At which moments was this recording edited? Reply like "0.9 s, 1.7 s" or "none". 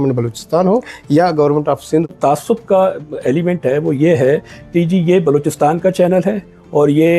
2.1 s